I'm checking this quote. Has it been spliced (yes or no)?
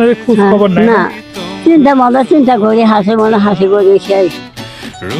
yes